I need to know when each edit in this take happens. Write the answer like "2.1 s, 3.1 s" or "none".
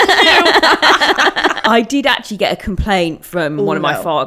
1.6 s

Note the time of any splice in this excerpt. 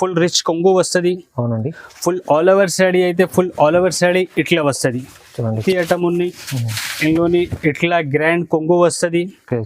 5.6 s

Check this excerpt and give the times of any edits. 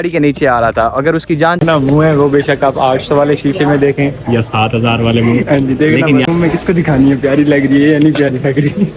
1.6 s, 6.2 s

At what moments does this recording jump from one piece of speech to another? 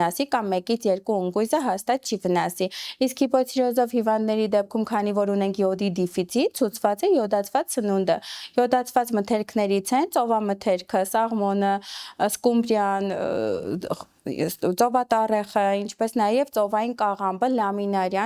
none

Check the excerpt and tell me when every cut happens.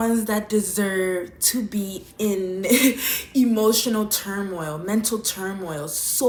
none

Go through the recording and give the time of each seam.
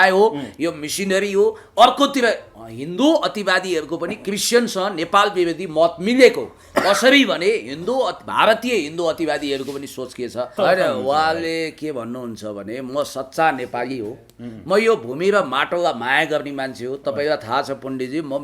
10.5 s

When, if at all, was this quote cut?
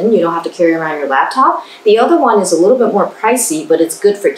none

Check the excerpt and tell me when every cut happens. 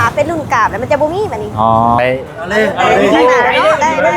2.0 s

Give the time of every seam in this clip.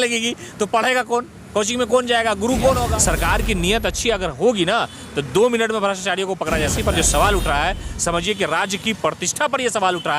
3.0 s, 6.7 s

